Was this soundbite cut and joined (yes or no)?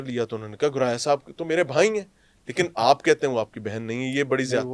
no